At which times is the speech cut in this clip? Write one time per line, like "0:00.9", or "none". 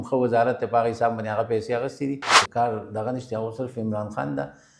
0:02.3